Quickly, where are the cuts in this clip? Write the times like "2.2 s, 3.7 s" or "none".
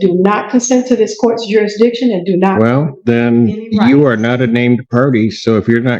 2.9 s